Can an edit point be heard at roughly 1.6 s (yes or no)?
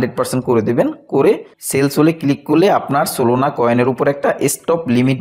no